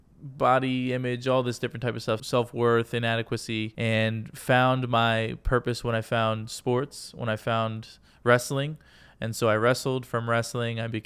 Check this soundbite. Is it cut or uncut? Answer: cut